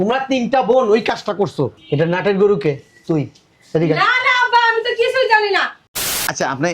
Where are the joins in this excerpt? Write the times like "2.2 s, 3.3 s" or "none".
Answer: 5.8 s